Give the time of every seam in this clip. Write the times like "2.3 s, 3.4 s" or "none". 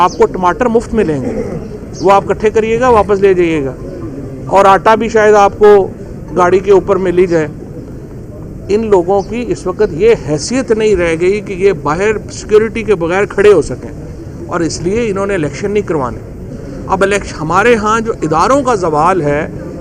none